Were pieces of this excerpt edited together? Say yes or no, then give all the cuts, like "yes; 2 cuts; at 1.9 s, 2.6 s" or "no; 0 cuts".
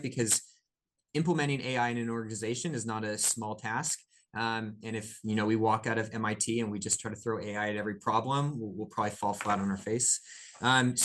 no; 0 cuts